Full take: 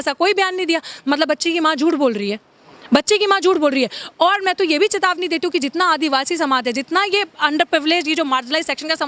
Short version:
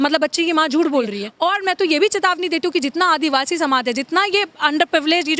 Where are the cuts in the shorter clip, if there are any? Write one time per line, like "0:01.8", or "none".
0:01.2